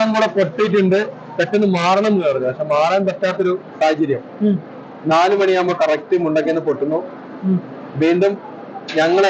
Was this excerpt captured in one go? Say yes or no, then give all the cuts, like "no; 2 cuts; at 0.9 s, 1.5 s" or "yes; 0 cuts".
yes; 0 cuts